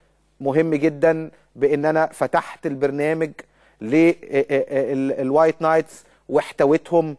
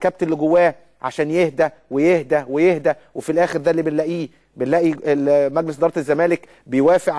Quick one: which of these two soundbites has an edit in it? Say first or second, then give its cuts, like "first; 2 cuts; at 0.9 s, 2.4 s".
second; 1 cut; at 3.0 s